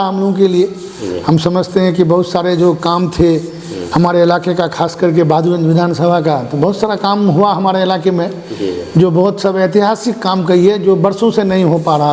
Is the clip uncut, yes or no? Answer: yes